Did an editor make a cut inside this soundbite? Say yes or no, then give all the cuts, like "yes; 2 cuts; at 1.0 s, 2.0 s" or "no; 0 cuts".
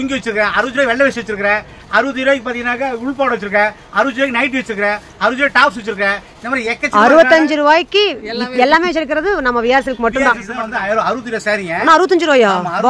yes; 1 cut; at 10.6 s